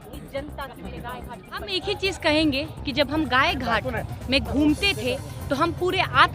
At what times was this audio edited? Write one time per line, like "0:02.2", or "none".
0:01.8